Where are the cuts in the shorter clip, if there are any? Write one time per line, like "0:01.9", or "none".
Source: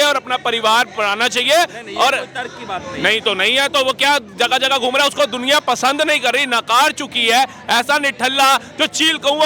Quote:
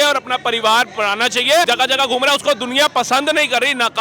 0:01.7